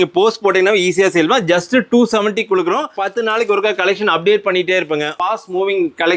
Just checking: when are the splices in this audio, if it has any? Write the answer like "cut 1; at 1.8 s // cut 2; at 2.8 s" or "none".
cut 1; at 3.0 s // cut 2; at 5.2 s